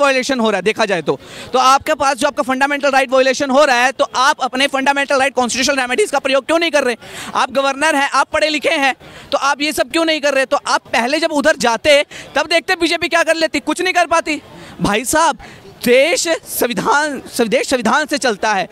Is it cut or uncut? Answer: uncut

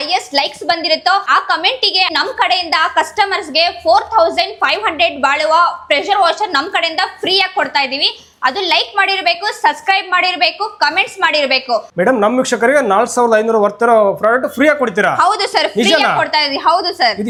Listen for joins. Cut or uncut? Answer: uncut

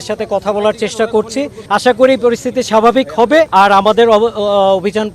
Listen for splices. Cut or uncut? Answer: cut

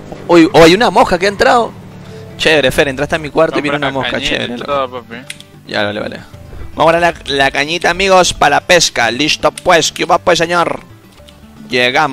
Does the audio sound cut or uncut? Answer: uncut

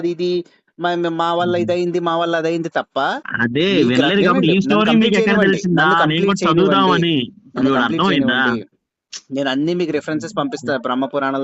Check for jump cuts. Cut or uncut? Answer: uncut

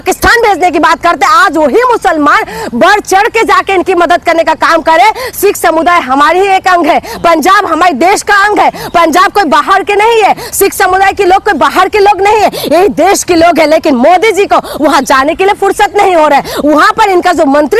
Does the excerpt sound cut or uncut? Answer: uncut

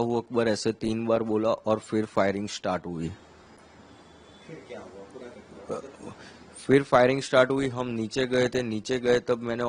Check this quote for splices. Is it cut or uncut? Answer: uncut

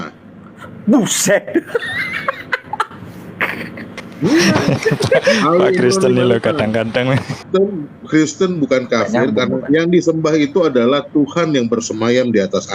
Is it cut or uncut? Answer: cut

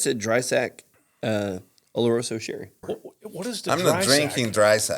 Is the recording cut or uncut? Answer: cut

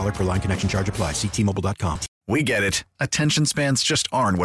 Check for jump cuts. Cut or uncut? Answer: cut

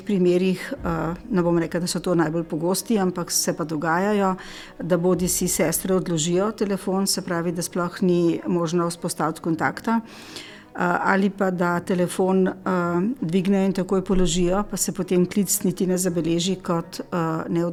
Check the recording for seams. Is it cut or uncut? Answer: uncut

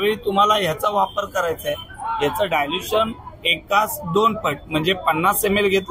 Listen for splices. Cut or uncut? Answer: uncut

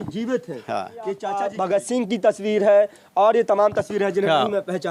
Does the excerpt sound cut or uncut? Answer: cut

